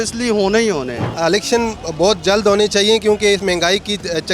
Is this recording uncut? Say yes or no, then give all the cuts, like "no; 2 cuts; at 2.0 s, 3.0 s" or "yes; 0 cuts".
no; 2 cuts; at 1.1 s, 3.4 s